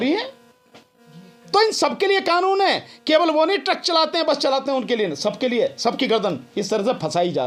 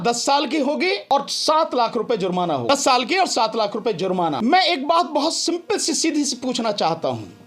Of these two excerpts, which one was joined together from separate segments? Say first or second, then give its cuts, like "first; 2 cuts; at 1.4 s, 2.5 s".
second; 3 cuts; at 1.0 s, 2.7 s, 4.4 s